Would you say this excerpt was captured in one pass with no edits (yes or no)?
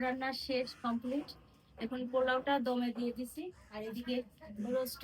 yes